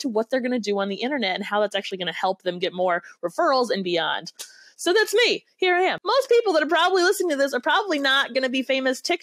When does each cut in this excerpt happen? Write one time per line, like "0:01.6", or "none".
0:06.0